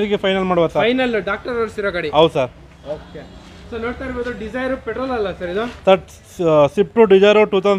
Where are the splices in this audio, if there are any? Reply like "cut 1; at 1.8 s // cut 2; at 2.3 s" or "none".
none